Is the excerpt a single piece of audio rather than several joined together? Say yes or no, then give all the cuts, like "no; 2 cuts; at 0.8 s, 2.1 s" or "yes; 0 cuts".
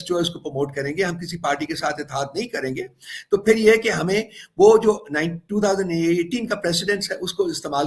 yes; 0 cuts